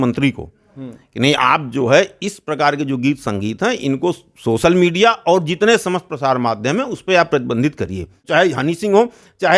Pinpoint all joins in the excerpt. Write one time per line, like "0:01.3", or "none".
0:08.2